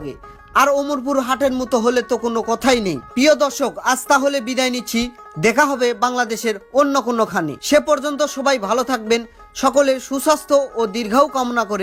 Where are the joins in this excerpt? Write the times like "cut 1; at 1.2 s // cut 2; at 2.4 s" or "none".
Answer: none